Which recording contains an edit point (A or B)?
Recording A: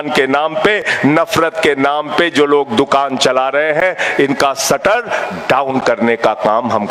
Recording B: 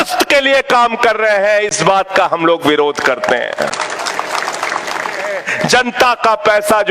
B